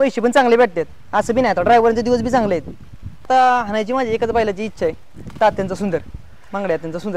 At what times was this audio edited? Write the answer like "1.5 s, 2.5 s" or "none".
3.2 s